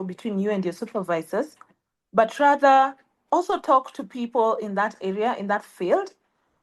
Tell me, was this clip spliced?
no; 0 cuts

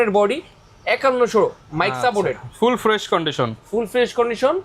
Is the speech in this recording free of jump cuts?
yes; 0 cuts

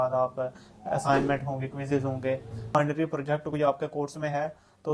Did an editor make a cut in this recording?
yes; 1 cut; at 2.7 s

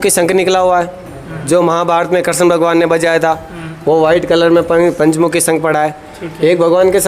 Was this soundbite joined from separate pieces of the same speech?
no; 0 cuts

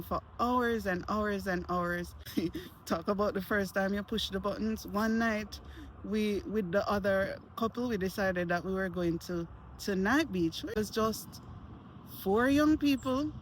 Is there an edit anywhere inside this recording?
yes; 2 cuts; at 2.2 s, 10.7 s

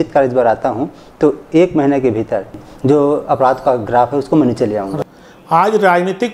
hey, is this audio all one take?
no; 2 cuts; at 2.5 s, 4.9 s

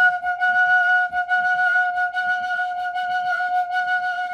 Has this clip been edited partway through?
no; 0 cuts

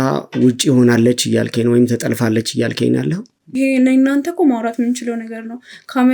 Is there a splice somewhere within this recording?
yes; 1 cut; at 3.5 s

